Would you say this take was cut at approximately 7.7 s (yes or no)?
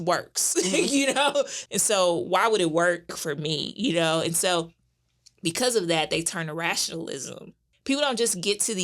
yes